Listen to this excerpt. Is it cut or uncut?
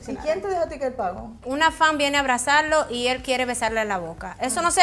cut